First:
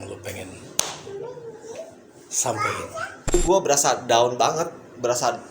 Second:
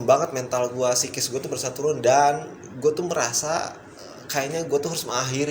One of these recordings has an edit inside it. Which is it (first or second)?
first